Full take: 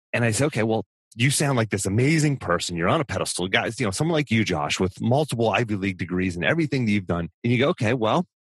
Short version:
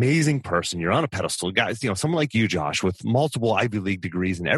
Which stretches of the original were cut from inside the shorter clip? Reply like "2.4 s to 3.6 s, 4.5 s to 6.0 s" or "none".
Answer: none